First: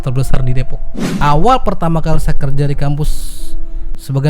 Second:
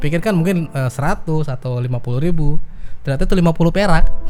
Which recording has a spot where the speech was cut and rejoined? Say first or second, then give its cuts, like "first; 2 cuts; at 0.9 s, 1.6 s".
first; 1 cut; at 1.1 s